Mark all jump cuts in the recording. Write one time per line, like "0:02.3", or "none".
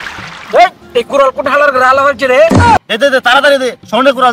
0:02.8